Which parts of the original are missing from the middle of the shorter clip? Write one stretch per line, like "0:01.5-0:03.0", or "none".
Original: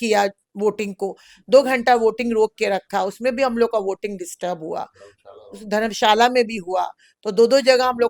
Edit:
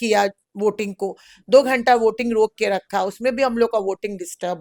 none